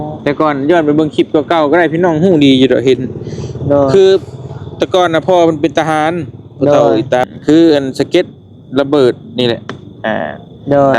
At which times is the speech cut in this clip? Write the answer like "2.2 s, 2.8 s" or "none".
7.3 s